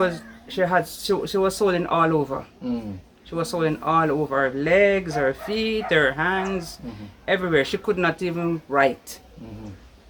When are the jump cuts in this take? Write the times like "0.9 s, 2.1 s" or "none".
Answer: none